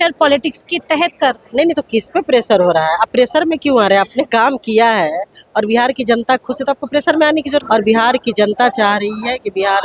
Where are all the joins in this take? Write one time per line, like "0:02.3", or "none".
0:07.6